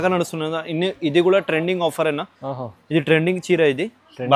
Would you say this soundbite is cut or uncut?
uncut